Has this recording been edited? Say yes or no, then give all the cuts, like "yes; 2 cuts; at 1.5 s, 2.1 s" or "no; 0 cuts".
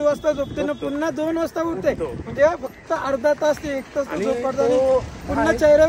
no; 0 cuts